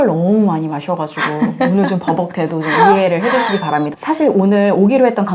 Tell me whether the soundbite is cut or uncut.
uncut